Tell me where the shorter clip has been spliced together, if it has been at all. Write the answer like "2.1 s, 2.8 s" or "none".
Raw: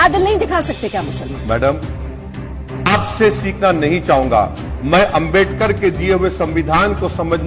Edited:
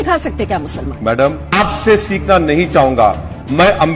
1.4 s

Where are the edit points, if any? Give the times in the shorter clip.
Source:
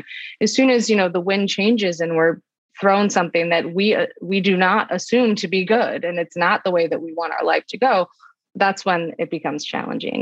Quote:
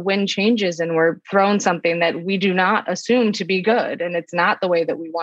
1.2 s, 2.2 s

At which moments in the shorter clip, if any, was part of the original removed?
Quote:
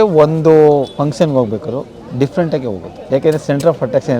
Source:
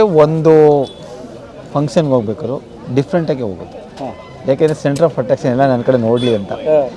0.9 s, 2.9 s

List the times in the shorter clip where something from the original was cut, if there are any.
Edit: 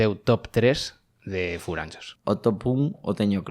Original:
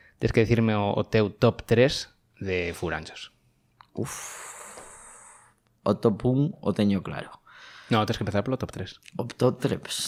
2.0 s

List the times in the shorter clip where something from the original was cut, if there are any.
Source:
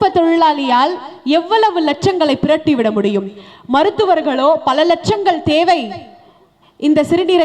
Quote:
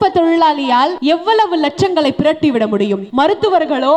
1.0 s, 3.0 s

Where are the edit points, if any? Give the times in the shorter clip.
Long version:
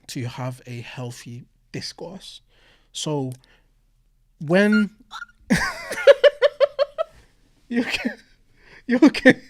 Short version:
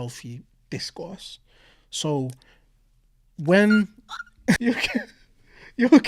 4.6 s

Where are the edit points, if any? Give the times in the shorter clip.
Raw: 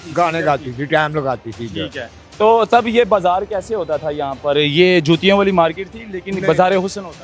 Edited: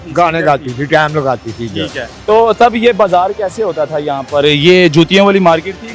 2.1 s

